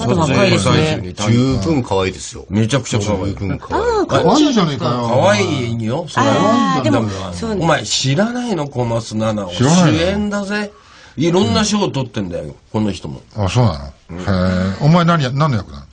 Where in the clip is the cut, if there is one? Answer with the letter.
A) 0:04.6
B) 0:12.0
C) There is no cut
B